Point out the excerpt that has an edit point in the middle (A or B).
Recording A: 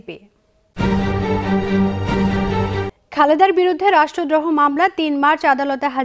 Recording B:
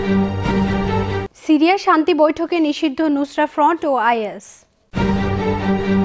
B